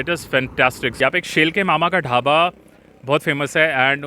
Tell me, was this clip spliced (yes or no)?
yes